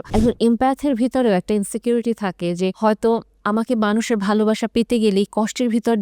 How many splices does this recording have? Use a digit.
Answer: 1